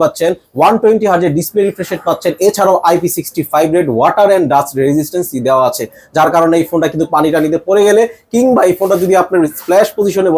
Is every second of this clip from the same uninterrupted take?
yes; 0 cuts

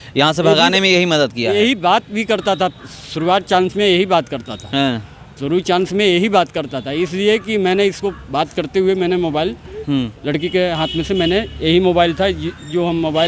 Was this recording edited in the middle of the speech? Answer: no; 0 cuts

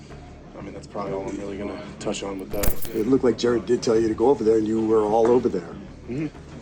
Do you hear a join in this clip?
no; 0 cuts

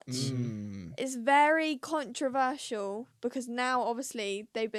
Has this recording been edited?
no; 0 cuts

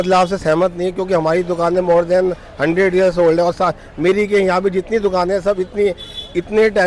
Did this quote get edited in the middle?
no; 0 cuts

